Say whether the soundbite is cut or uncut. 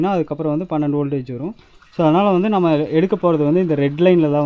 uncut